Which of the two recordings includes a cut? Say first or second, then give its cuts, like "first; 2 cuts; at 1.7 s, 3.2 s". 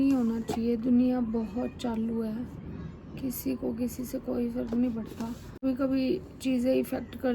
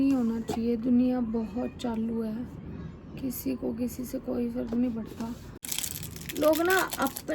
second; 1 cut; at 5.5 s